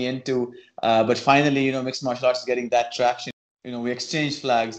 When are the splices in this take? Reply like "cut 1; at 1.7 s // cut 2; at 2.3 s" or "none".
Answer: cut 1; at 3.3 s

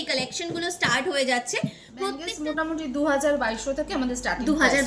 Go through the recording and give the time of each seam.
cut 1; at 2.2 s

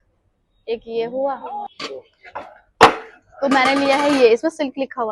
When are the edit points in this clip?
cut 1; at 1.7 s

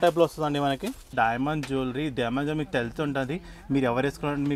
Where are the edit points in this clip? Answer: cut 1; at 1.0 s

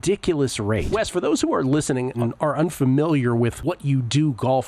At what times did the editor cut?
cut 1; at 0.8 s // cut 2; at 2.2 s // cut 3; at 3.6 s

